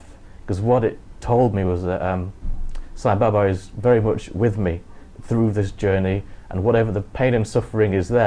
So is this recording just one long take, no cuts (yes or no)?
yes